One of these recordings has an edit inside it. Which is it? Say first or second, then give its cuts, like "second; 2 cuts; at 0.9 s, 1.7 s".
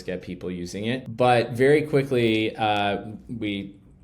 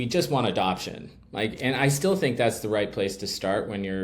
first; 1 cut; at 1.1 s